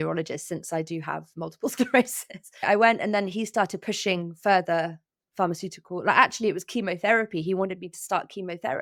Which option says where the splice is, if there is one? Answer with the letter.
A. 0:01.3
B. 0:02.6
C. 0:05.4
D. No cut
B